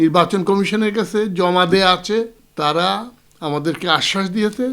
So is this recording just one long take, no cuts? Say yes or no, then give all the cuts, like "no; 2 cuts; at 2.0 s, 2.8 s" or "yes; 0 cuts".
no; 1 cut; at 2.4 s